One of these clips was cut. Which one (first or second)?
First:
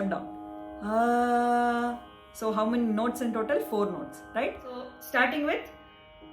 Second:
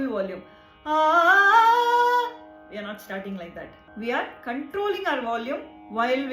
first